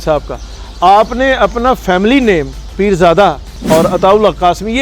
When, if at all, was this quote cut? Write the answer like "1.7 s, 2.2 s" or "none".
3.5 s